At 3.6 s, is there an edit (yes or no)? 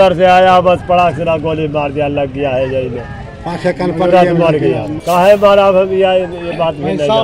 no